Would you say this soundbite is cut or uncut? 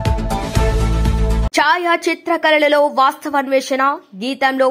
cut